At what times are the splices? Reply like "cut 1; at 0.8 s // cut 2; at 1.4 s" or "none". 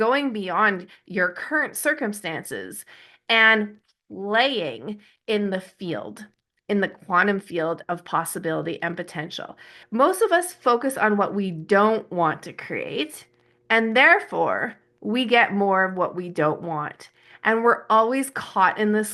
cut 1; at 9.7 s